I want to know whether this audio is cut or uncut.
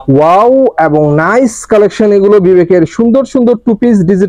uncut